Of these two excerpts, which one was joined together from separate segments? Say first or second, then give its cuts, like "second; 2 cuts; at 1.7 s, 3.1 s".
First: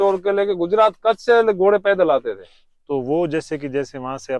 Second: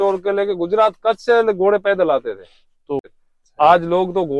second; 1 cut; at 3.0 s